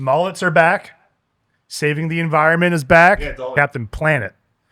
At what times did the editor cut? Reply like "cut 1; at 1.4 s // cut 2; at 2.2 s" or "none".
cut 1; at 3.2 s